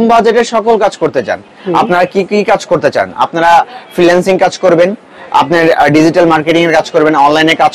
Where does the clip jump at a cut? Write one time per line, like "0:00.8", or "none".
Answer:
none

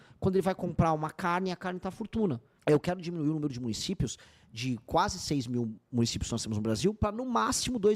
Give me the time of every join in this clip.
0:02.5

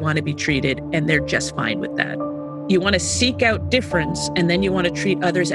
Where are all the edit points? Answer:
none

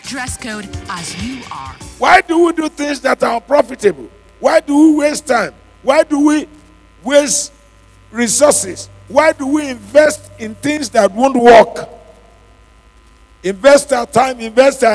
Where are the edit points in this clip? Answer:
0:01.8

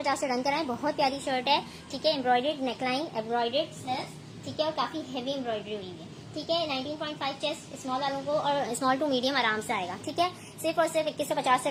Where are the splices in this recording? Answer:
none

